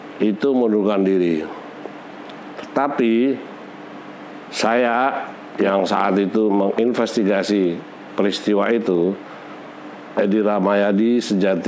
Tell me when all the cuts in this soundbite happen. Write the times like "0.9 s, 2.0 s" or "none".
none

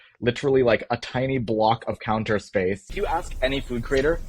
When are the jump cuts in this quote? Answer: 2.9 s

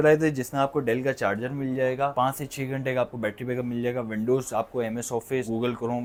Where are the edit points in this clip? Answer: none

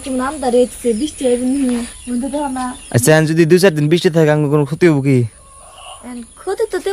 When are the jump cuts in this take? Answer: 2.0 s

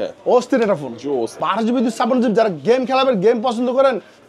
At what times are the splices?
1.4 s

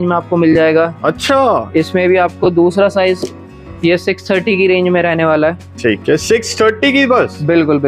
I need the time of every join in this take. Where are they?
none

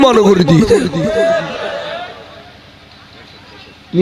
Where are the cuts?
none

